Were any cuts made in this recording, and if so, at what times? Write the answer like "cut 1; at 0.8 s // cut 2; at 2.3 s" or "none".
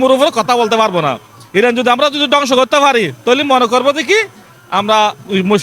none